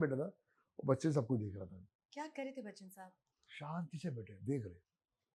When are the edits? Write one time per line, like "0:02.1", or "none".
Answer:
none

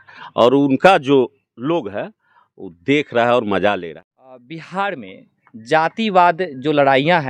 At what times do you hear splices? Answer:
0:03.9

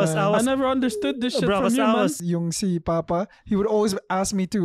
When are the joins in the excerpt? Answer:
0:02.2

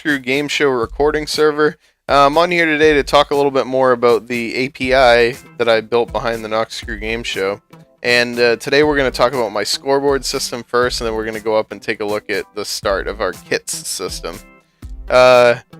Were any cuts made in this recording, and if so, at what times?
0:10.3

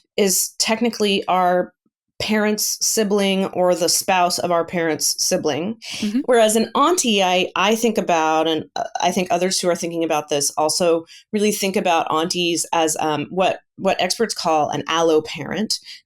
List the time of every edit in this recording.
0:06.0

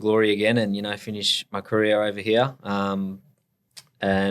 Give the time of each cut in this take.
none

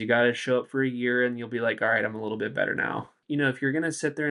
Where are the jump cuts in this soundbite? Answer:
0:03.1

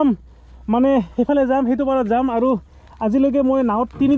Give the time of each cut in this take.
none

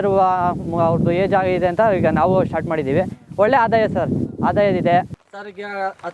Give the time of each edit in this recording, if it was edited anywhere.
0:05.2

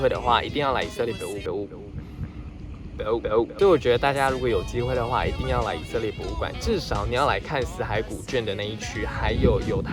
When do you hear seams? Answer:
none

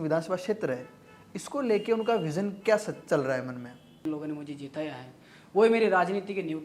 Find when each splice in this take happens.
0:04.0

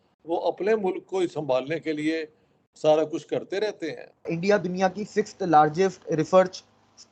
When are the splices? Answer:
0:04.2

